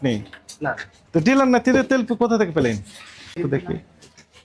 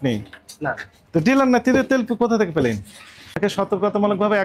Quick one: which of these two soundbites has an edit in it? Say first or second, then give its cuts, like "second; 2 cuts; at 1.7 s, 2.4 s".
second; 1 cut; at 3.3 s